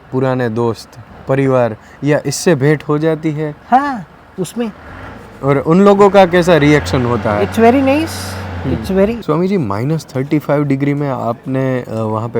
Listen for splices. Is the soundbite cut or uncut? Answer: cut